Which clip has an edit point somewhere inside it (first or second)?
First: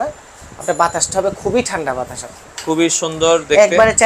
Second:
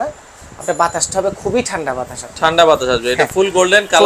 first